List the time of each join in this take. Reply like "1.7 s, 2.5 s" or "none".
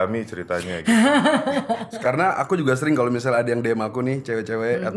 1.9 s